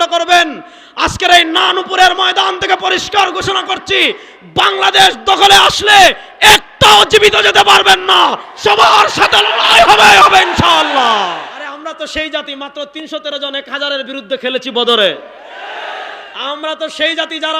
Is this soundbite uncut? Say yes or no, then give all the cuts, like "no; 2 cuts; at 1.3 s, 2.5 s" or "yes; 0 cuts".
no; 1 cut; at 11.7 s